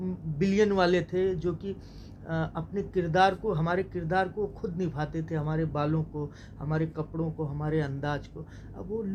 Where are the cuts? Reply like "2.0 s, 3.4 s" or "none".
none